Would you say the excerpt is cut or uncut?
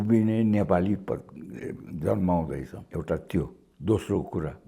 cut